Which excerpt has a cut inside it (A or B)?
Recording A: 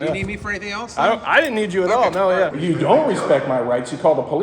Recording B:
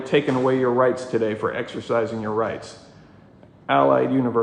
A